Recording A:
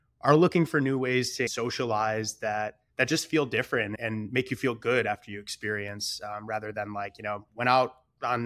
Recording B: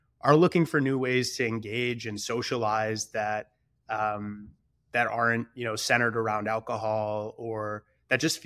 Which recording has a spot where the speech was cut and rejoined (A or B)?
A